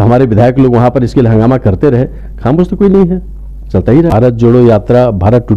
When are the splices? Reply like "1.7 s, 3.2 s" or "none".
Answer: 4.1 s

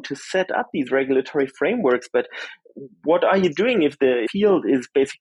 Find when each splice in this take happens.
4.3 s

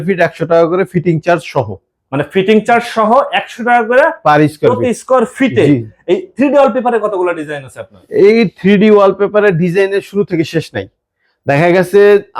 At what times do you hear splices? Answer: none

